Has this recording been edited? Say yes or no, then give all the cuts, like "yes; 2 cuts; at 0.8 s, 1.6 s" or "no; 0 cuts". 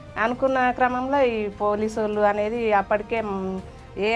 no; 0 cuts